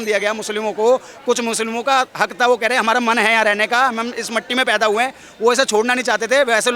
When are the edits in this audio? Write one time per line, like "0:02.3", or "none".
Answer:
none